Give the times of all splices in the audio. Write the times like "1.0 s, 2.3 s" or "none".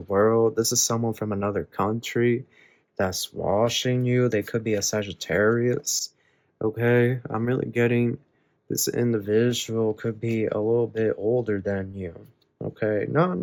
none